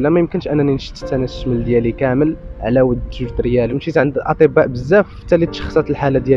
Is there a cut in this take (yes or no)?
yes